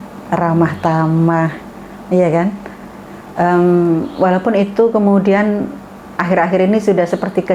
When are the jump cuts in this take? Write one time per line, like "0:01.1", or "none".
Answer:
none